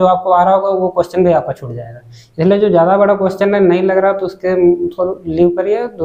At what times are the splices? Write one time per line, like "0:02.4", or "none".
none